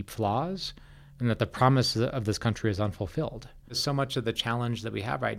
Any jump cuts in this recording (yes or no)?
yes